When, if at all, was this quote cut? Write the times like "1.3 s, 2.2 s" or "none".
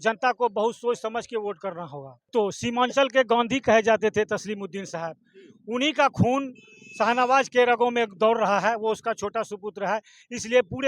2.3 s